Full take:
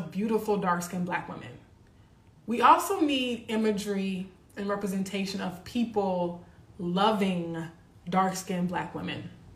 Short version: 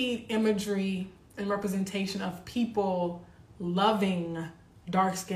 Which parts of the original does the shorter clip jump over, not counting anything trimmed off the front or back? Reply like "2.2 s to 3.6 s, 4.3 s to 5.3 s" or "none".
none